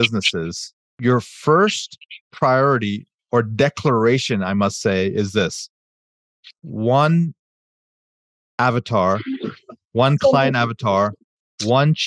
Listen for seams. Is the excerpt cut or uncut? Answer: cut